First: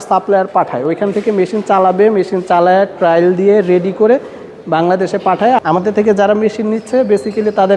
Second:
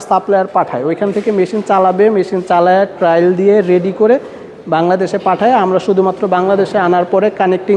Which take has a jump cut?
first; 1 cut; at 5.6 s

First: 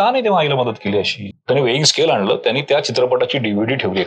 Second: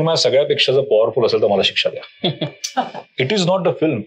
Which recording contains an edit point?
first; 1 cut; at 1.2 s

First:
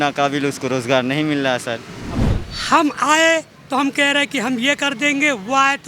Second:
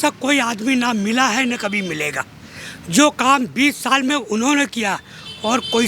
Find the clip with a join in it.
first; 1 cut; at 2.2 s

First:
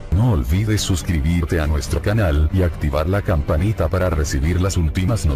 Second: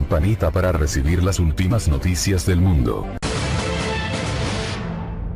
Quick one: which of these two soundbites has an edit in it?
second; 1 cut; at 3.0 s

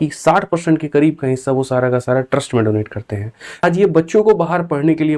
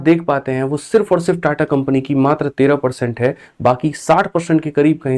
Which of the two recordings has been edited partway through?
first; 1 cut; at 3.6 s

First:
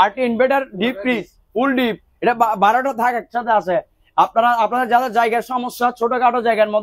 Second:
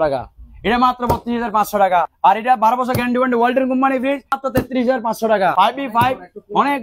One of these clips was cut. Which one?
second; 3 cuts; at 2.1 s, 4.4 s, 5.5 s

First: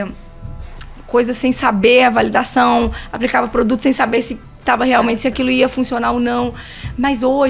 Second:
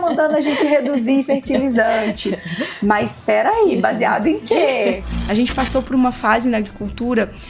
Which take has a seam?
second; 1 cut; at 5.1 s

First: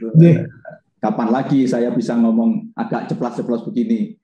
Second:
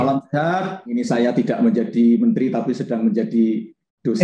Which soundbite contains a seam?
second; 1 cut; at 1.0 s

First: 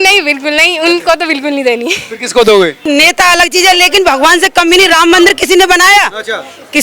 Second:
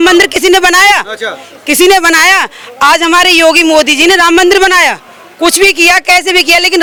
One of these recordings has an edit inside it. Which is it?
first; 1 cut; at 2.8 s

